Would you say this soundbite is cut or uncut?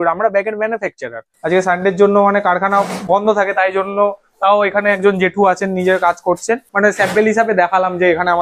cut